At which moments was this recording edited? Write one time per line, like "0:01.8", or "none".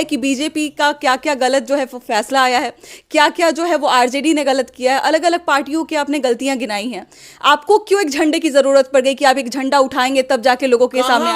none